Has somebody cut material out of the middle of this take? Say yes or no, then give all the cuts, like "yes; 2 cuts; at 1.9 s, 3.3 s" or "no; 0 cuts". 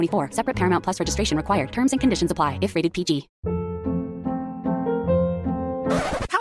yes; 1 cut; at 3.3 s